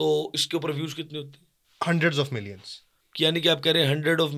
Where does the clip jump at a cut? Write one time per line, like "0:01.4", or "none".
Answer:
none